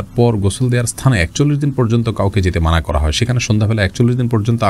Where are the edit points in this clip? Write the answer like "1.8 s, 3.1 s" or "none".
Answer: none